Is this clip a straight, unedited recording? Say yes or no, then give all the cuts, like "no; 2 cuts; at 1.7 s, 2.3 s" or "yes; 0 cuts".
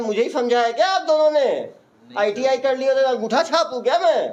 yes; 0 cuts